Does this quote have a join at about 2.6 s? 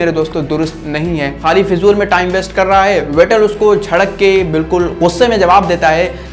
no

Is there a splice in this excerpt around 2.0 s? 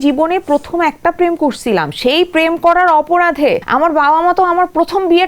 no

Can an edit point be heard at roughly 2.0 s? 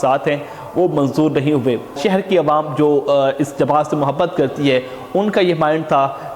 yes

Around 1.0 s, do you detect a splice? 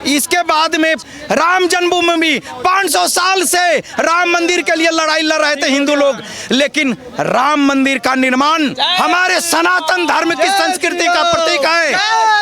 yes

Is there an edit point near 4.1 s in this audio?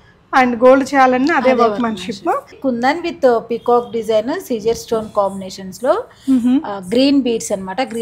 no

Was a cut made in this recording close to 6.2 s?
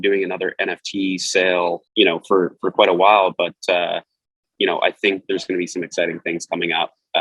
no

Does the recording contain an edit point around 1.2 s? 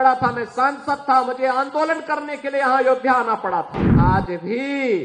no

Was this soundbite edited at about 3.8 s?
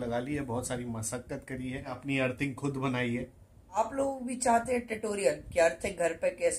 yes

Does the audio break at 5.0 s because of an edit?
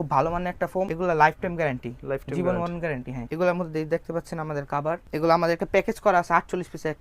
yes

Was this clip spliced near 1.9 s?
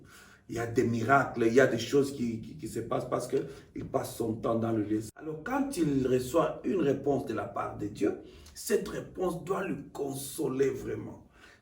no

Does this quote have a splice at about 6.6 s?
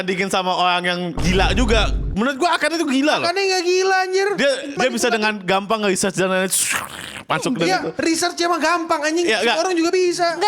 no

